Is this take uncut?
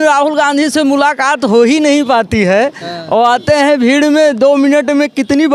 yes; 0 cuts

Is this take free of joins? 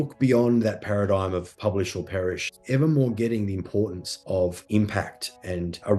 no; 1 cut; at 2.5 s

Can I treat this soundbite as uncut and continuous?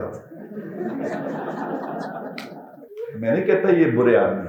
no; 1 cut; at 2.9 s

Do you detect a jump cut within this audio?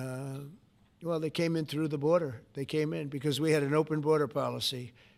no; 0 cuts

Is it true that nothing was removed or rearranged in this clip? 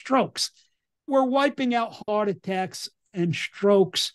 no; 1 cut; at 1.0 s

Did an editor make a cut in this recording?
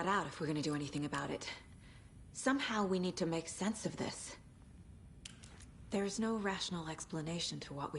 yes; 2 cuts; at 4.4 s, 5.9 s

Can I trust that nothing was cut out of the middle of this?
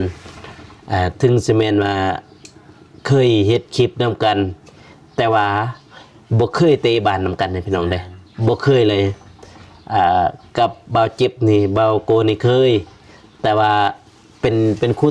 yes; 0 cuts

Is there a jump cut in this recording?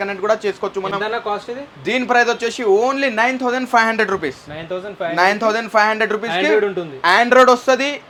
no; 0 cuts

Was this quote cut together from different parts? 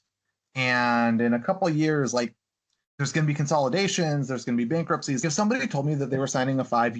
yes; 1 cut; at 5.2 s

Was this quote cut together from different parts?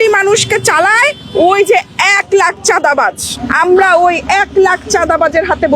no; 0 cuts

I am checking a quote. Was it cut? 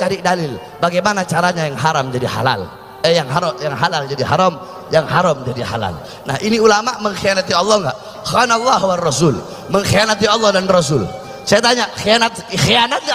no; 0 cuts

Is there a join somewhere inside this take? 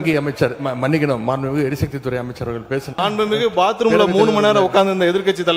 yes; 1 cut; at 3.0 s

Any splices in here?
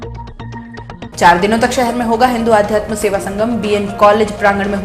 yes; 1 cut; at 1.1 s

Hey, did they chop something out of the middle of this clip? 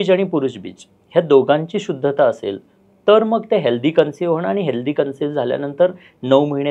no; 0 cuts

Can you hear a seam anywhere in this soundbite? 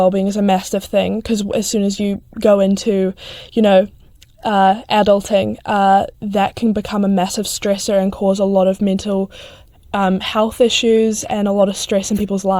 no; 0 cuts

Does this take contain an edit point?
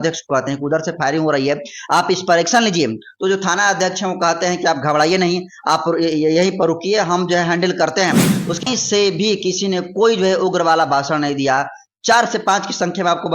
yes; 1 cut; at 8.6 s

